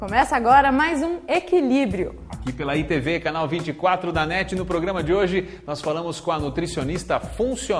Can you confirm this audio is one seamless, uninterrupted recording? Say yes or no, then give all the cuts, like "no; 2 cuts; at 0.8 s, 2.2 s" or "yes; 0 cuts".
yes; 0 cuts